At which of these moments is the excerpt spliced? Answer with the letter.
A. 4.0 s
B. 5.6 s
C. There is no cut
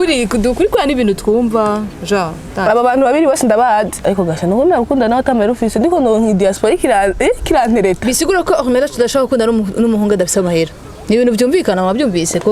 A